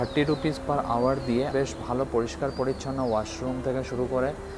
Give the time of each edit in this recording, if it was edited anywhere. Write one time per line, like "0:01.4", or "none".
none